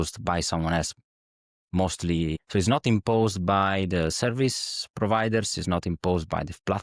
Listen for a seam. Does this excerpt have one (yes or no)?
yes